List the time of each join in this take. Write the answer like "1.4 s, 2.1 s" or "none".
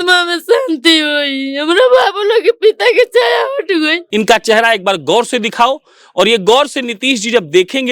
4.0 s